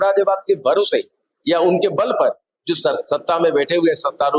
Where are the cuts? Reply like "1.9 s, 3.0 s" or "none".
none

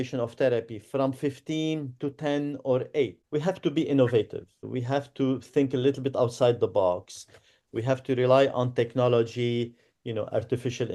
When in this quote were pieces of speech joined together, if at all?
3.2 s, 4.6 s

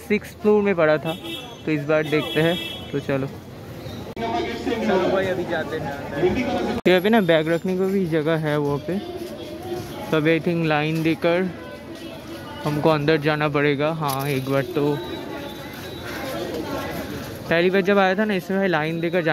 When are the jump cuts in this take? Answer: 4.1 s

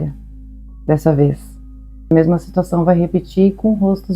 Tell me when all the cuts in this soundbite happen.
2.1 s

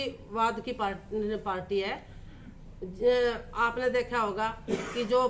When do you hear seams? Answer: none

